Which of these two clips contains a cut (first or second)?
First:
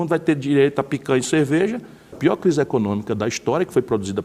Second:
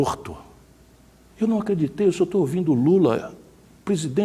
first